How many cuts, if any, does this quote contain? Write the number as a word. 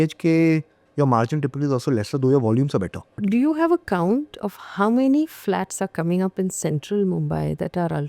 one